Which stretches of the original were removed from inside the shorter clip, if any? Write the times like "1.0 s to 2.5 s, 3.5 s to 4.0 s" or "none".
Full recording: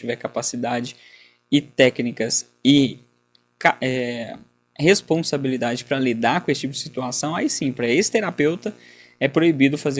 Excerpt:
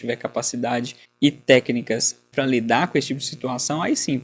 1.0 s to 1.3 s, 2.6 s to 5.8 s

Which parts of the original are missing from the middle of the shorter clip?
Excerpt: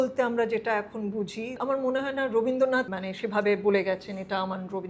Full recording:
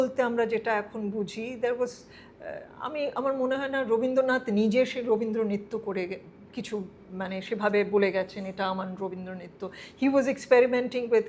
1.6 s to 3.1 s, 4.4 s to 7.2 s

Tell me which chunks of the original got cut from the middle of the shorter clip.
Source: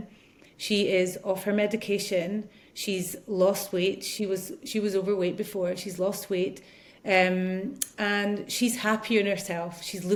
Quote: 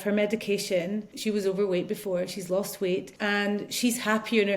2.5 s to 4.6 s, 6.6 s to 7.9 s

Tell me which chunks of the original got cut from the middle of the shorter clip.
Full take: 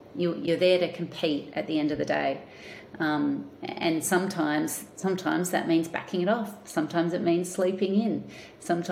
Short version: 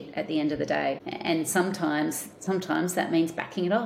2.5 s to 3.6 s

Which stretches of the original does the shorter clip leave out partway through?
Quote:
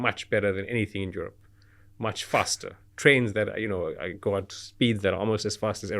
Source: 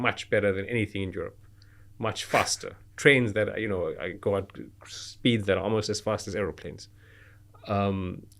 4.6 s to 5.0 s

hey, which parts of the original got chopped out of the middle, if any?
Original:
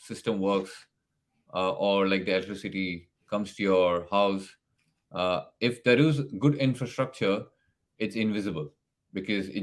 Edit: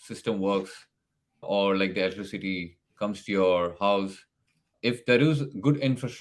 1.4 s to 1.8 s, 5.0 s to 5.5 s

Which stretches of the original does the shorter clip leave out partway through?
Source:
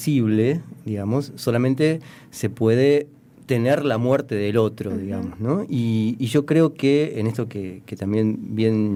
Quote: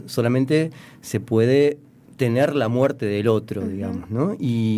none

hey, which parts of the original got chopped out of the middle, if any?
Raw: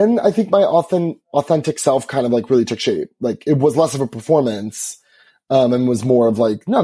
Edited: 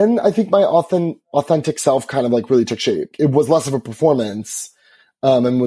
3.1 s to 3.4 s

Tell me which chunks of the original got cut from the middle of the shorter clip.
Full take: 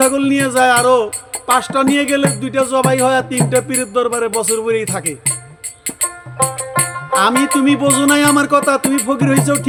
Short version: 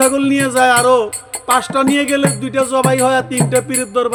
none

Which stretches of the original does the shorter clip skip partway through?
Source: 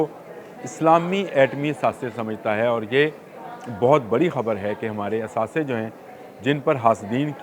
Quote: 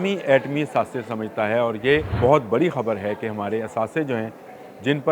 3.2 s to 3.7 s

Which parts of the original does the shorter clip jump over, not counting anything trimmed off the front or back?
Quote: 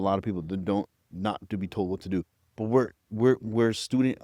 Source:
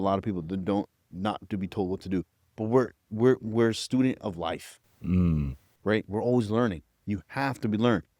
none

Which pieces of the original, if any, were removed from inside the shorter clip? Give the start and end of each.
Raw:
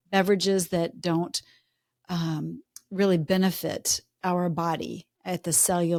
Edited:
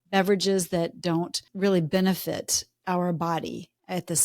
1.4 s to 2.8 s

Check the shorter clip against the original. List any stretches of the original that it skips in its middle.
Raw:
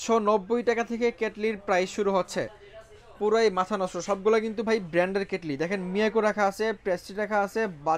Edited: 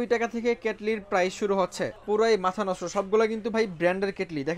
2.5 s to 3.1 s

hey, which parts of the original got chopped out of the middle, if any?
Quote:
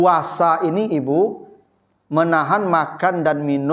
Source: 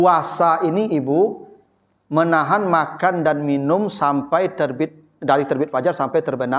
none

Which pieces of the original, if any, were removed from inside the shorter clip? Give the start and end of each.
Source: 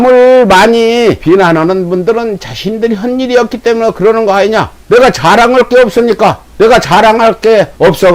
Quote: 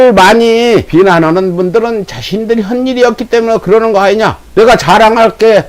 4.8 s to 6.5 s

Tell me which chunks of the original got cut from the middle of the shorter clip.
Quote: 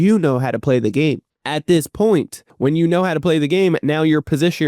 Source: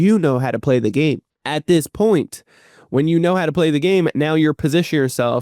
2.4 s to 2.7 s

